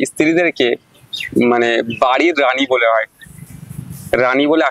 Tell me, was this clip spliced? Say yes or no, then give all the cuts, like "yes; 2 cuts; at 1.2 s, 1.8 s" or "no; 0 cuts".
no; 0 cuts